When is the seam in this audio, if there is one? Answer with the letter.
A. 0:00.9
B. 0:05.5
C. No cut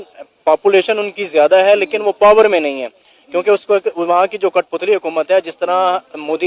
C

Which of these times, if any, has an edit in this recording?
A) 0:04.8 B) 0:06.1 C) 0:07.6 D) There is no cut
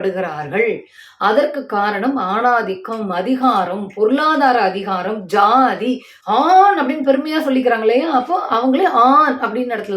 B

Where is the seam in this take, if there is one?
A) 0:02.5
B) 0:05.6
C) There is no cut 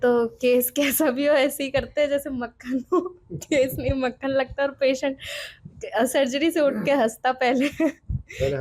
C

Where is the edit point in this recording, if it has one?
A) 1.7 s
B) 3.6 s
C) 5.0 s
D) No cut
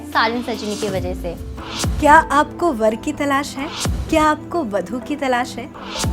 A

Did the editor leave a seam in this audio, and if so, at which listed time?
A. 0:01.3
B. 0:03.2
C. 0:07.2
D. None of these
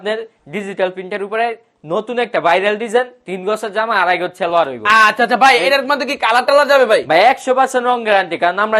D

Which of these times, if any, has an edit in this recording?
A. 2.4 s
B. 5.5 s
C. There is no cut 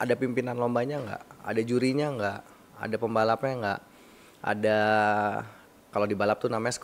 C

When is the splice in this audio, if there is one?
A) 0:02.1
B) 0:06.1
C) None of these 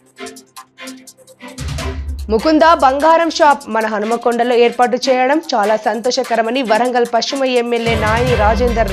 A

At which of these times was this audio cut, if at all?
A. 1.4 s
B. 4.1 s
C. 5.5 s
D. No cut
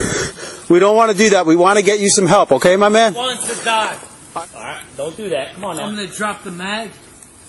B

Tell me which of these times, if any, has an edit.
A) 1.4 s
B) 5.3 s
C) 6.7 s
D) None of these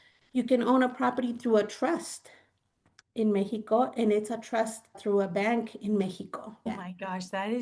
C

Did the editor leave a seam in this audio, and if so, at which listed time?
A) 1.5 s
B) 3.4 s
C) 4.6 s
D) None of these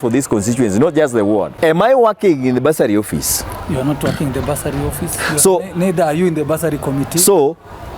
A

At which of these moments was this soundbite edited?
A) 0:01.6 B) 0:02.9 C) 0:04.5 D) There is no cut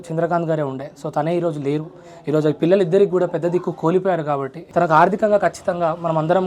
C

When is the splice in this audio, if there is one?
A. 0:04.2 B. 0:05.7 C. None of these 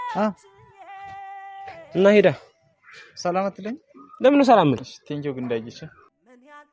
B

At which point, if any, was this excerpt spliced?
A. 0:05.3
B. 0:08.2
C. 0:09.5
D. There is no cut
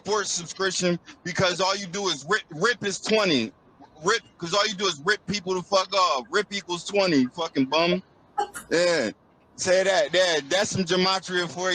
B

